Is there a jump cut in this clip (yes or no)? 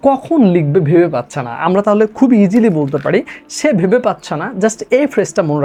no